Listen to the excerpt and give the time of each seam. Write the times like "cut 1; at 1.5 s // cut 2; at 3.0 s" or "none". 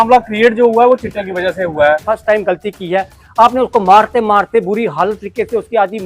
cut 1; at 2.0 s